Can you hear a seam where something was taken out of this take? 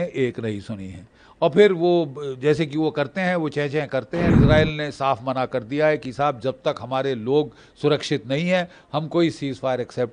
yes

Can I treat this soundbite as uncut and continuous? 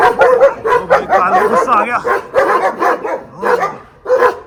yes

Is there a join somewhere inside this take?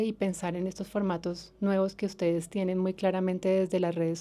no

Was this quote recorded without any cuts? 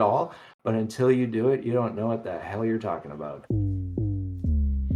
no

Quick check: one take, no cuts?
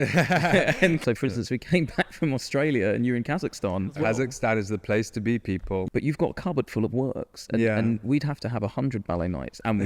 no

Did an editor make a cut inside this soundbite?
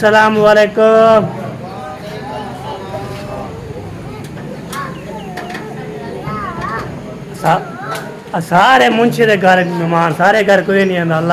no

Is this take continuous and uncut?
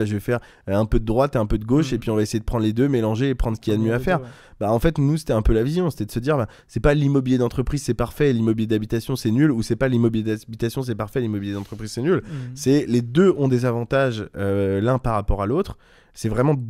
yes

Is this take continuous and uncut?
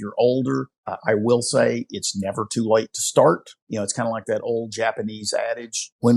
yes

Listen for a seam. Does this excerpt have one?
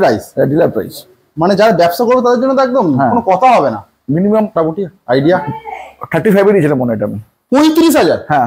yes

